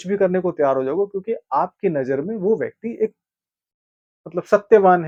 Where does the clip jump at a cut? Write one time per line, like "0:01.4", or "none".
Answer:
none